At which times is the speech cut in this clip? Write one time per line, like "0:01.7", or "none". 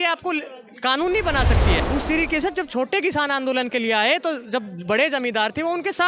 0:01.8